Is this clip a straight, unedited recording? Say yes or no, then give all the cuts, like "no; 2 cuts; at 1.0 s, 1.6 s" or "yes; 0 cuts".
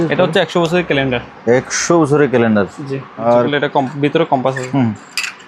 no; 1 cut; at 3.2 s